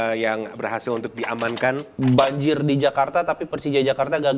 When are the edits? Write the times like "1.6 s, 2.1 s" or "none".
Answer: 2.0 s